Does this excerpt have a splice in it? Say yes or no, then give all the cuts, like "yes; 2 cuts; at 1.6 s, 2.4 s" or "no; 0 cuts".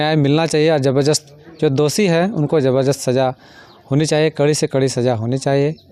no; 0 cuts